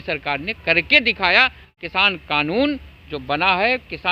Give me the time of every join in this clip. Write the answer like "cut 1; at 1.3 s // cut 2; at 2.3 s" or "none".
cut 1; at 1.6 s